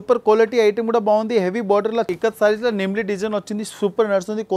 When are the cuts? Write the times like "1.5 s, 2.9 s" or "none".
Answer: 2.1 s